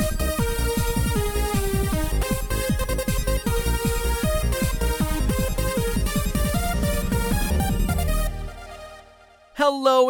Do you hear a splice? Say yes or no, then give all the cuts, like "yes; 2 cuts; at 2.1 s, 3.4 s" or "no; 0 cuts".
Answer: yes; 1 cut; at 6.3 s